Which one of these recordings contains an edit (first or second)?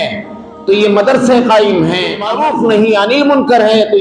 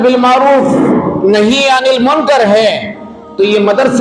first